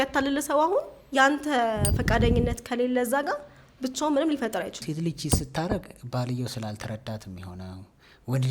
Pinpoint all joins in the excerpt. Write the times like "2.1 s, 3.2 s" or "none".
4.8 s